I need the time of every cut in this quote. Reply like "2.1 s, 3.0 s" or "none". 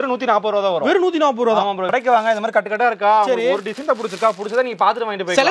1.9 s